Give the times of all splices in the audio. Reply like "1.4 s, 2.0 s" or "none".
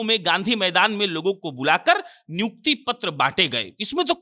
none

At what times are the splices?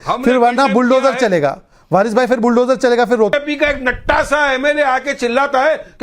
3.3 s

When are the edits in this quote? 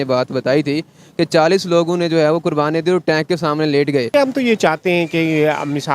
4.1 s

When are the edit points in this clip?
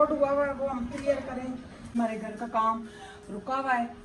1.9 s

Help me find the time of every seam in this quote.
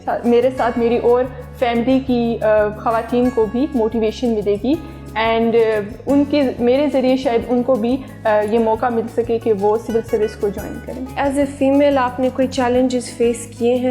none

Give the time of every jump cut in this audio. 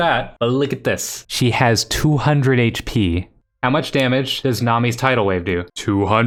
none

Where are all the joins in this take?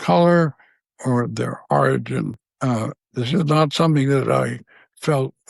2.5 s

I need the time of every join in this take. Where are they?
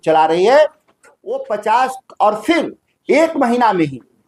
1.4 s

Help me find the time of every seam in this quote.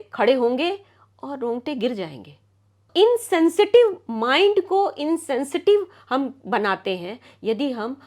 2.9 s

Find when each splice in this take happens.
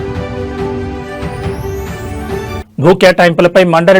2.6 s

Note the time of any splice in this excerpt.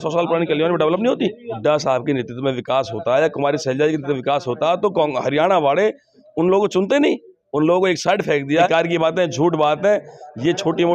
1.5 s, 8.7 s

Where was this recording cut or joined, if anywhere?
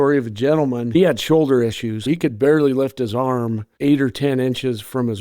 0.9 s, 2.0 s, 3.7 s

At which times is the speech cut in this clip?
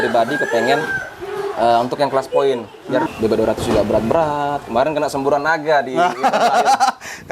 3.1 s

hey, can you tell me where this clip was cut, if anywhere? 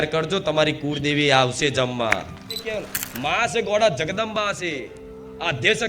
2.6 s

